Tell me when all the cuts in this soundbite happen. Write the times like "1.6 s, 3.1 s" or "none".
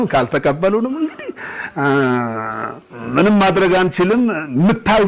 none